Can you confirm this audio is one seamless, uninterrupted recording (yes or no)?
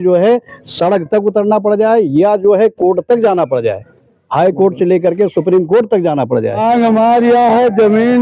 no